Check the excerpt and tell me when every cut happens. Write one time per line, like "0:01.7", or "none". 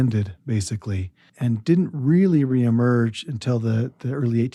none